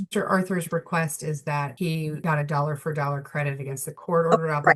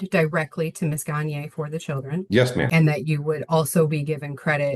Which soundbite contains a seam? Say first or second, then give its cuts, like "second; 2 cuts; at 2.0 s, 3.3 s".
second; 1 cut; at 2.7 s